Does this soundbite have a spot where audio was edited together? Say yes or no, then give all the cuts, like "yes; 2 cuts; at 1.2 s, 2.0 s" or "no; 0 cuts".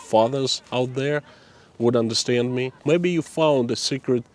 yes; 1 cut; at 2.8 s